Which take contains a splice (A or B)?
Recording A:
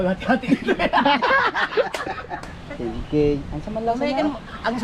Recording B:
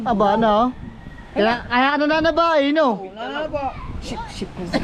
A